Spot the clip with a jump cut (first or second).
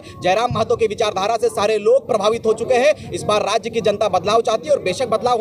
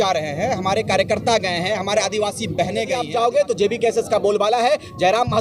second